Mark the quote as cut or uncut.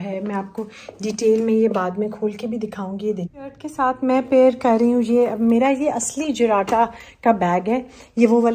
cut